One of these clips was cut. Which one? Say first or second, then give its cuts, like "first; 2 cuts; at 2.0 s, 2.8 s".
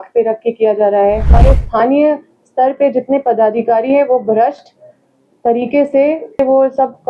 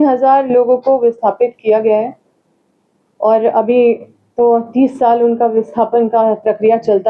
first; 2 cuts; at 1.4 s, 6.4 s